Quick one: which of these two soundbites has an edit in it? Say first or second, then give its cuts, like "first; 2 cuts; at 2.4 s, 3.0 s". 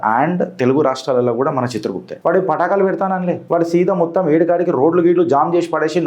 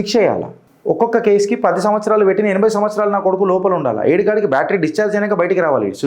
first; 2 cuts; at 2.0 s, 3.4 s